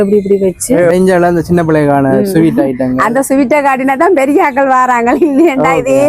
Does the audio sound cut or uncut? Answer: cut